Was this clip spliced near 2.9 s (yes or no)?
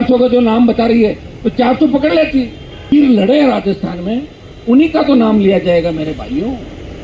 yes